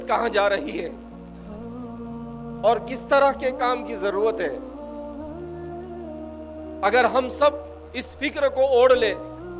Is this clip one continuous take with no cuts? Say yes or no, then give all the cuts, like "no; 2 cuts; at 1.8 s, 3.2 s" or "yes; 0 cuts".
no; 4 cuts; at 0.9 s, 2.3 s, 4.6 s, 6.8 s